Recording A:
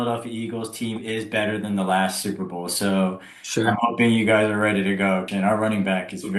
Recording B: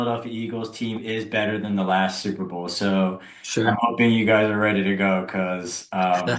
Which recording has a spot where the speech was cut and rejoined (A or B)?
A